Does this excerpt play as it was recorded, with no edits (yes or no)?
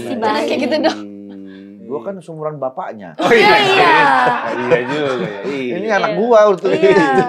yes